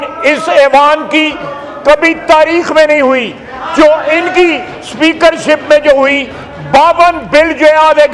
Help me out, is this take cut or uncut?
uncut